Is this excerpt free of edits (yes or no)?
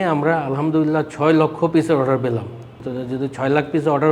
no